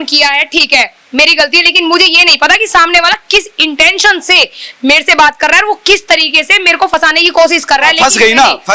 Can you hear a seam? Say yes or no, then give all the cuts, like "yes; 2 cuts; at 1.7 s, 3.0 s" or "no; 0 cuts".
no; 0 cuts